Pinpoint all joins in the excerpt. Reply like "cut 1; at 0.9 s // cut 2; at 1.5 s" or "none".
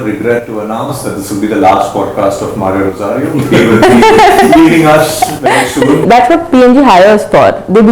cut 1; at 6.0 s